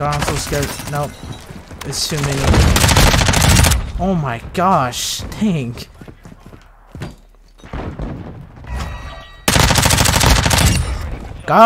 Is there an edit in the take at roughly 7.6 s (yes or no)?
yes